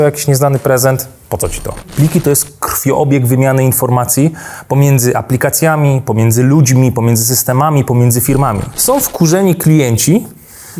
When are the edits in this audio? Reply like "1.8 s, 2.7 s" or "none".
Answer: 1.9 s, 8.7 s

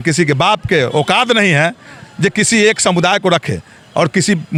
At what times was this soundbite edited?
none

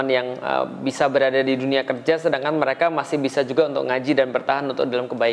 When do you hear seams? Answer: none

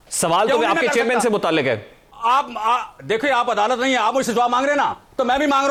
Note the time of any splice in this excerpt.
none

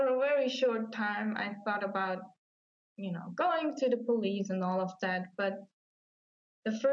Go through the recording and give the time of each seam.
none

